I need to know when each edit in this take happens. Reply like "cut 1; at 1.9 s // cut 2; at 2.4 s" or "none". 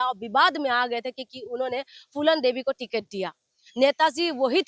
none